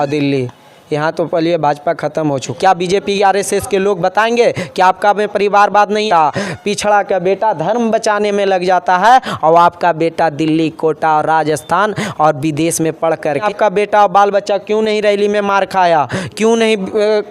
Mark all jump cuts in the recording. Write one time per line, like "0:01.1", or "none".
0:02.5
0:06.1
0:13.4